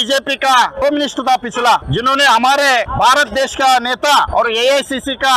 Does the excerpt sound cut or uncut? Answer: cut